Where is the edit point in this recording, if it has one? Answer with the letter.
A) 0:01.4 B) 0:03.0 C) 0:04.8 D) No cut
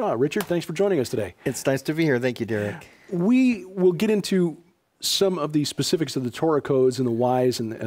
C